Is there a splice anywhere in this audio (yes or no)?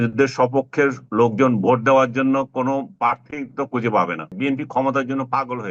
yes